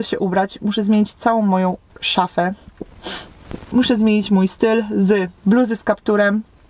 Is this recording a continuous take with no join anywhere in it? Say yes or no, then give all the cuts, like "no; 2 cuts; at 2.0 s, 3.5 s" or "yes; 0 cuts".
yes; 0 cuts